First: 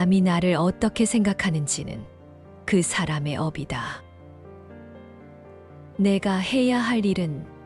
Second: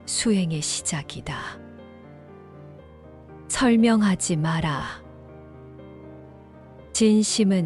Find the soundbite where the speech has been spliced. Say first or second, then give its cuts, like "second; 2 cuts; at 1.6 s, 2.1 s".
second; 4 cuts; at 1.5 s, 3.4 s, 4.9 s, 6.4 s